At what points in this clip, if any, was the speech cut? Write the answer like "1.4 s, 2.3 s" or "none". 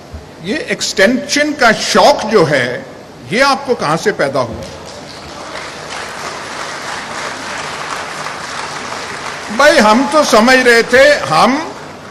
none